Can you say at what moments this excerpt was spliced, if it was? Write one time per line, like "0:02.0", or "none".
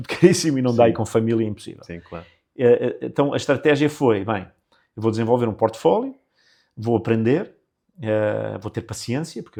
none